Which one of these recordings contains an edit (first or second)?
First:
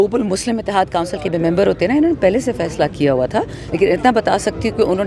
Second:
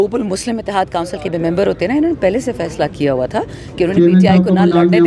first